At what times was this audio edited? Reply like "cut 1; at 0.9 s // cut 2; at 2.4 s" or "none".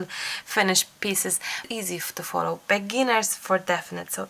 cut 1; at 1.7 s

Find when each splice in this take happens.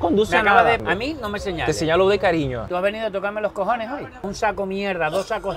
cut 1; at 0.8 s // cut 2; at 2.6 s // cut 3; at 4.3 s

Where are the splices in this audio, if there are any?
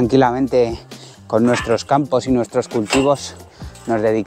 none

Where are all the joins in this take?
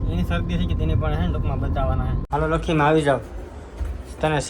cut 1; at 2.2 s

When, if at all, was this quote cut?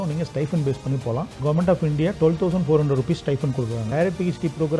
cut 1; at 1.4 s // cut 2; at 3.8 s

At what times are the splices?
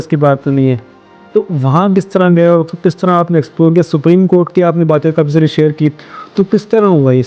none

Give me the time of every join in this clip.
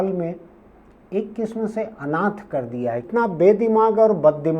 cut 1; at 3.1 s

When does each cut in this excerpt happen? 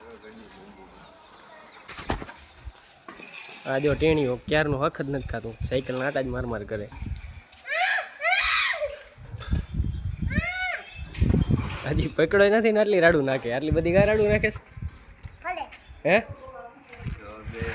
cut 1; at 1.8 s

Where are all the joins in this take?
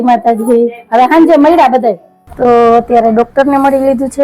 cut 1; at 2.1 s

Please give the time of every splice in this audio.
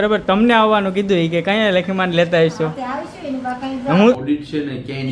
cut 1; at 4.2 s

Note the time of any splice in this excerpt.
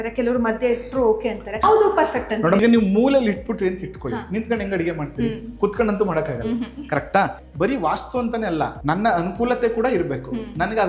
cut 1; at 1.6 s // cut 2; at 2.6 s // cut 3; at 7.4 s // cut 4; at 8.8 s

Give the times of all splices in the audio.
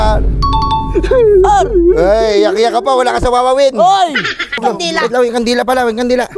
cut 1; at 4.6 s

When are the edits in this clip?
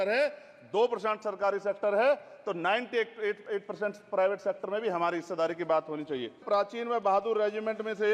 cut 1; at 6.4 s

